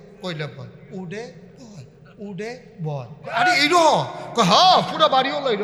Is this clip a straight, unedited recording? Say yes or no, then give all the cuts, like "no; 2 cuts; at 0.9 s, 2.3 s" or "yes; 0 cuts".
yes; 0 cuts